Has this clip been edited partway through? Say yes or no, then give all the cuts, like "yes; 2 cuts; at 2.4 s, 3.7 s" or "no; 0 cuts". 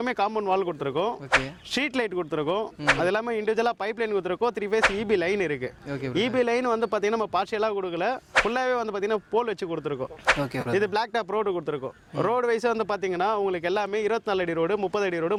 no; 0 cuts